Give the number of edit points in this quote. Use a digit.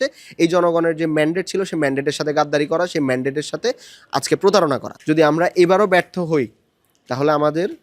1